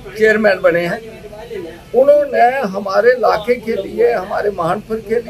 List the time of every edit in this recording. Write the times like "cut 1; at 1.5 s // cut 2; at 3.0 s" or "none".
none